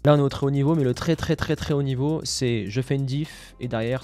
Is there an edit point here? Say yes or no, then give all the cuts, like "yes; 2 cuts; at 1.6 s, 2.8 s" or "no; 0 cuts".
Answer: no; 0 cuts